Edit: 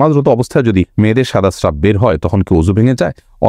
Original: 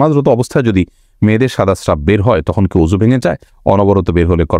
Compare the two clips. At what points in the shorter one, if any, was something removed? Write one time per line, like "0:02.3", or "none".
0:00.9